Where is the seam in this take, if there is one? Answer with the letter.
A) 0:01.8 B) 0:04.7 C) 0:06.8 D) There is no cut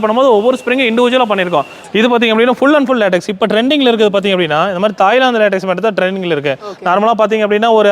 A